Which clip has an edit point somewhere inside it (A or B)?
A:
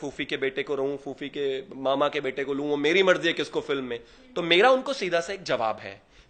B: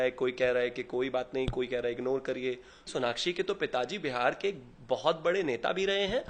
B